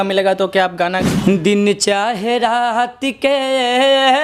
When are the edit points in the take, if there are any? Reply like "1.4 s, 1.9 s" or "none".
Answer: 1.1 s